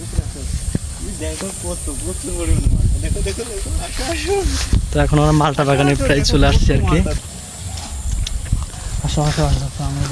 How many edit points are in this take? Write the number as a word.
one